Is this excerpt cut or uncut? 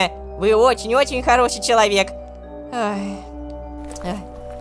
uncut